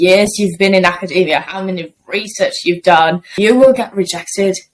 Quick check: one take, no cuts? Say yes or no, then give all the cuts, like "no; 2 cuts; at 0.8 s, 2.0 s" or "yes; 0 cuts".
no; 1 cut; at 3.3 s